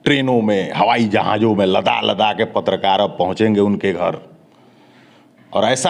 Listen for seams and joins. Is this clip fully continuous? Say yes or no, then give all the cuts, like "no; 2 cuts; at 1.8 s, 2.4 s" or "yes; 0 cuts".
yes; 0 cuts